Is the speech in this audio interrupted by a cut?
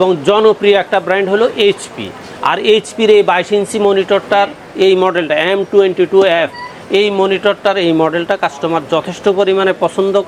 no; 0 cuts

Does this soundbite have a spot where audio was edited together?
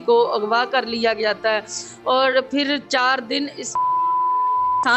no; 0 cuts

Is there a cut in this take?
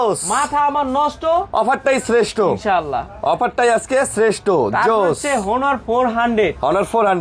no; 0 cuts

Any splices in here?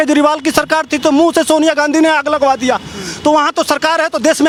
no; 0 cuts

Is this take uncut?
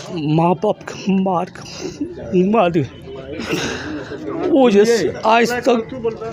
yes; 0 cuts

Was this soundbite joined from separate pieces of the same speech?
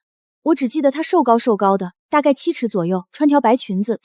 no; 0 cuts

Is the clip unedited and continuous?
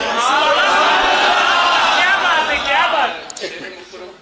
yes; 0 cuts

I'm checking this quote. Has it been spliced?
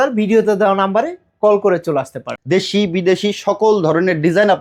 yes; 1 cut; at 2.3 s

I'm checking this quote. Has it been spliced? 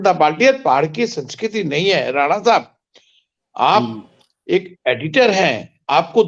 no; 0 cuts

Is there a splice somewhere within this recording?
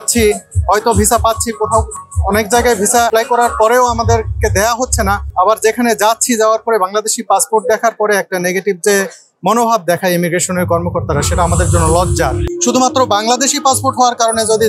yes; 3 cuts; at 3.1 s, 5.2 s, 12.5 s

